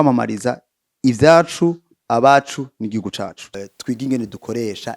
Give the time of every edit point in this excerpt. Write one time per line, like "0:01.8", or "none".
0:03.5

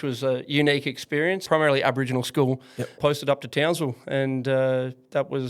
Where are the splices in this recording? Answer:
0:01.4
0:03.0

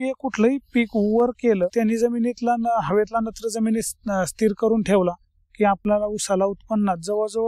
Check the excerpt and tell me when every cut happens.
0:01.7

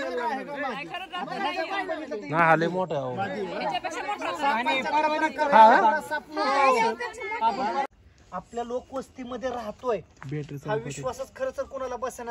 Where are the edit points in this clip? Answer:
0:07.9

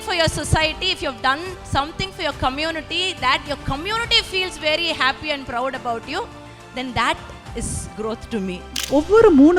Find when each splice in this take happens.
0:08.7

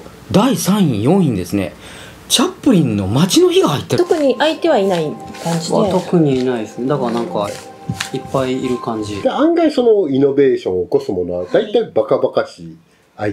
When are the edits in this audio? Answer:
0:03.9
0:09.2

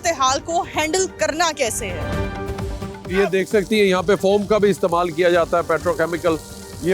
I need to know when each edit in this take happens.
none

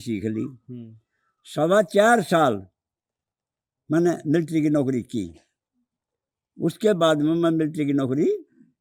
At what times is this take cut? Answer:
none

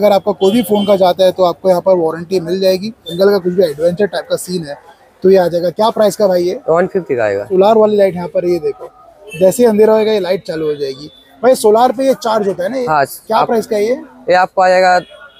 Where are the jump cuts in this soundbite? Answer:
0:03.1
0:07.5

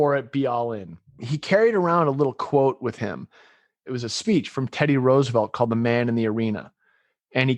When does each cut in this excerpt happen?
0:01.3
0:03.9

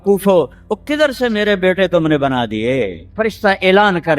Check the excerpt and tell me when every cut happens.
0:03.0

